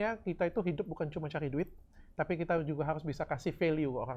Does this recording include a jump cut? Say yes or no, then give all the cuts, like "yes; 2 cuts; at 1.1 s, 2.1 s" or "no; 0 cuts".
no; 0 cuts